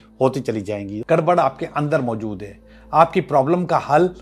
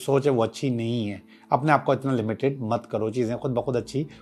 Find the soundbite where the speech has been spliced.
first; 1 cut; at 1.0 s

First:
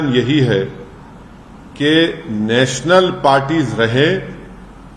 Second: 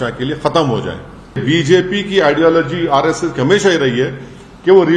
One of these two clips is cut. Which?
second; 1 cut; at 1.4 s

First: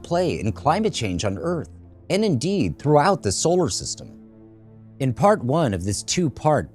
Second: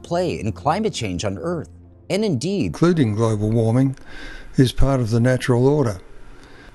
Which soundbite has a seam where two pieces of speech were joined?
first; 1 cut; at 2.7 s

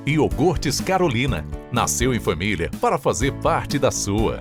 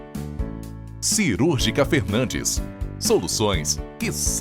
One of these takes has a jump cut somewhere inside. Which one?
second; 1 cut; at 1.2 s

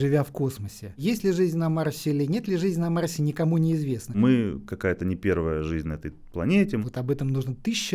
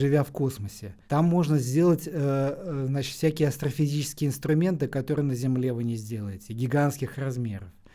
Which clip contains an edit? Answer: first; 3 cuts; at 1.0 s, 4.2 s, 6.8 s

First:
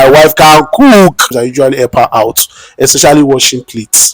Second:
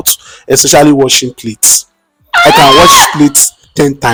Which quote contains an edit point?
first; 1 cut; at 1.3 s

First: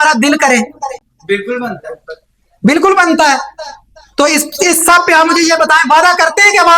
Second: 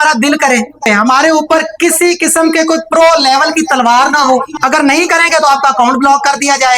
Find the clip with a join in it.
second; 2 cuts; at 0.9 s, 4.5 s

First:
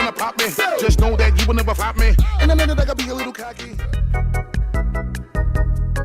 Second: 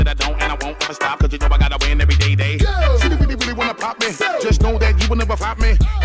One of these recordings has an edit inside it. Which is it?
first; 1 cut; at 3.5 s

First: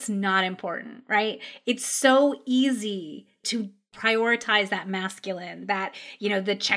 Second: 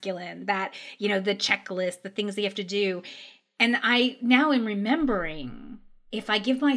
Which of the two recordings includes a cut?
first; 1 cut; at 3.9 s

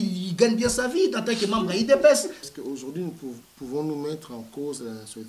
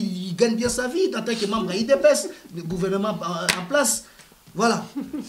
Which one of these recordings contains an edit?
first; 1 cut; at 2.5 s

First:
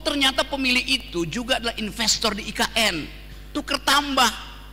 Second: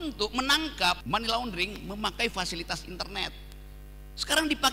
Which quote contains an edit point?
second; 1 cut; at 1.0 s

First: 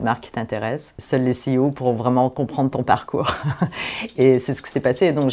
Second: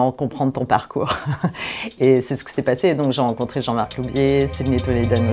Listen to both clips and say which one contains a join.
first; 1 cut; at 1.0 s

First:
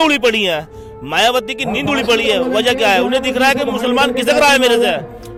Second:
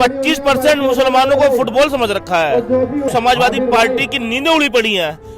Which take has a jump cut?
second; 1 cut; at 3.1 s

